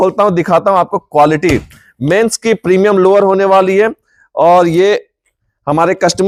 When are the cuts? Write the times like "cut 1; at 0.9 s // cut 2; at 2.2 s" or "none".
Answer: none